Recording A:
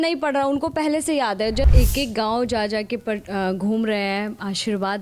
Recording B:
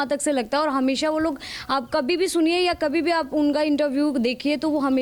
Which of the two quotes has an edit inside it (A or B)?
A